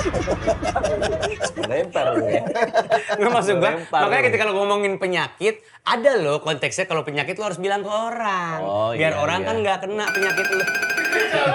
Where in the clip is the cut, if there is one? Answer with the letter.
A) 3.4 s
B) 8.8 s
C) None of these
C